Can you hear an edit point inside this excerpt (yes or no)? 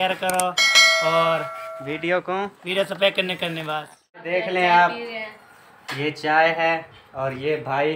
yes